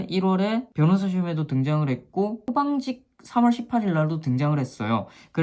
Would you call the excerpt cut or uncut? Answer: cut